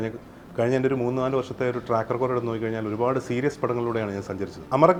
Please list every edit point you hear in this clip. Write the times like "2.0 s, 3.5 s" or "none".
none